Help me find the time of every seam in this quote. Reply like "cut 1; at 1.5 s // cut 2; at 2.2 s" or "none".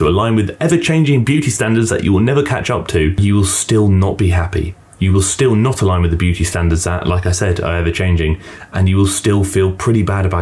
cut 1; at 3.2 s